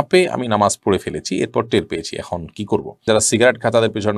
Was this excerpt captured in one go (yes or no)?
no